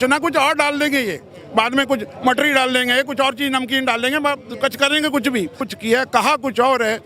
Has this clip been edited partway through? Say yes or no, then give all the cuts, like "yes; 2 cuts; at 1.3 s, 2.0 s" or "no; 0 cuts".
yes; 1 cut; at 5.7 s